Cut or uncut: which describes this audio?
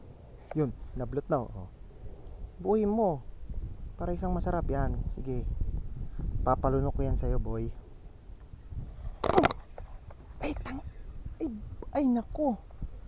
uncut